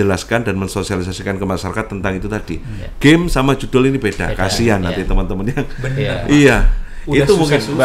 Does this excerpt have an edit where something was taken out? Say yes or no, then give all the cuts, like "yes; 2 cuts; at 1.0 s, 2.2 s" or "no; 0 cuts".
no; 0 cuts